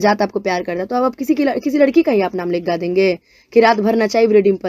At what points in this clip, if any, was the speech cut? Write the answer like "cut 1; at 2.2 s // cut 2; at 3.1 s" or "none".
none